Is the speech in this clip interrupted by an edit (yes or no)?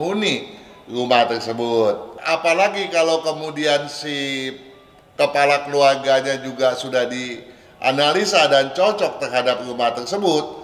yes